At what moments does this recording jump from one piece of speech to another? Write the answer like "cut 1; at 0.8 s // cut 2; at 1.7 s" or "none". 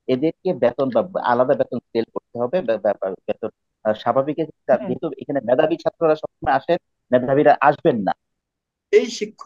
cut 1; at 8.3 s